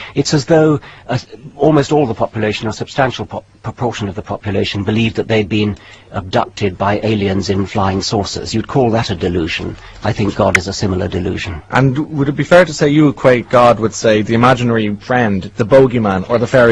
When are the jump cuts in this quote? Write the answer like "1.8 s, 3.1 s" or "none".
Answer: 2.1 s